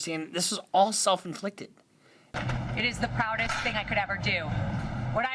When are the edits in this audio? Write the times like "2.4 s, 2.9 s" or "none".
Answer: 2.3 s